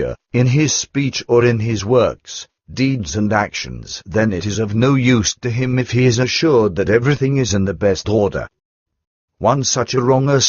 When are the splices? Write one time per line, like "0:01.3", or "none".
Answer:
0:05.3